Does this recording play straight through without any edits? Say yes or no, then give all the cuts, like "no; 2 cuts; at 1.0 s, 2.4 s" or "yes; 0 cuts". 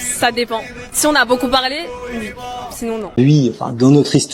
no; 1 cut; at 3.1 s